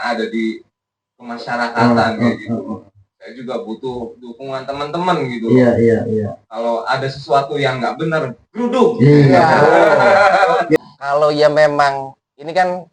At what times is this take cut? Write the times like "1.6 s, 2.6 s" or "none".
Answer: 10.8 s